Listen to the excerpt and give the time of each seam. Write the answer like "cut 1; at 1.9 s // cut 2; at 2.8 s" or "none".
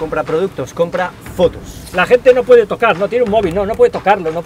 cut 1; at 1.7 s